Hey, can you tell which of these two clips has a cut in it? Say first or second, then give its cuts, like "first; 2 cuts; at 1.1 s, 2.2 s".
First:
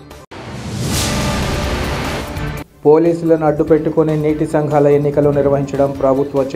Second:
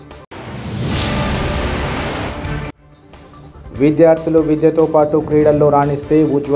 first; 1 cut; at 1.2 s